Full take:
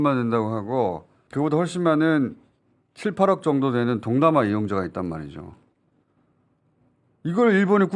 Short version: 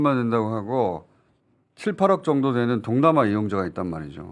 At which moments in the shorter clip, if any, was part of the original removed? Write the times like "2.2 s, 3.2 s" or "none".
1.2 s